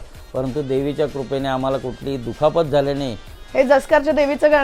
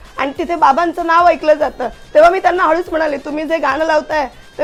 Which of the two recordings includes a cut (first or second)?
first